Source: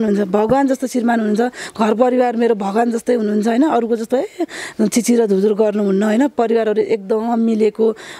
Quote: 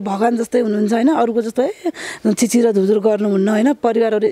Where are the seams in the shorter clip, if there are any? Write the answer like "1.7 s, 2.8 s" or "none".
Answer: none